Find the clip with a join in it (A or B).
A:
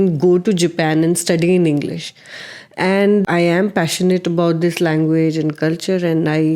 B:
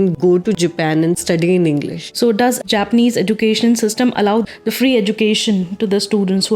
B